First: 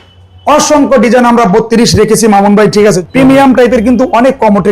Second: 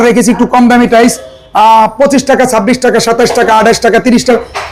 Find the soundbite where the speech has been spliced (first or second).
first